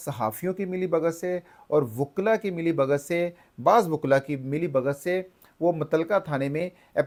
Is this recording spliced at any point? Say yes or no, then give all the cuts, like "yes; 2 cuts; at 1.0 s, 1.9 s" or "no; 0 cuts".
no; 0 cuts